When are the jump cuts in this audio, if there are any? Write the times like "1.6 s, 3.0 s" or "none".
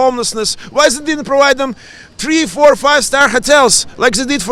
none